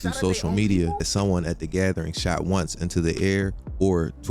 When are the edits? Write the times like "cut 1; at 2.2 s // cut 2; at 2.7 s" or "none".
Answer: cut 1; at 1.1 s